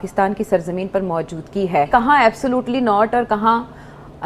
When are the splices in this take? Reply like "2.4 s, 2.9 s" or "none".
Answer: 1.9 s